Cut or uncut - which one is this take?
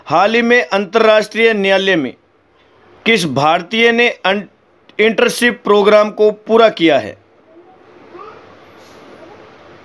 cut